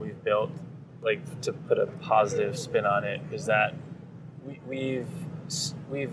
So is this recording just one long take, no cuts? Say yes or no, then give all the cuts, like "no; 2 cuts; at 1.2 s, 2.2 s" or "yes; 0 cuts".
yes; 0 cuts